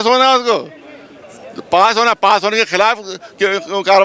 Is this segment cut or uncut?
uncut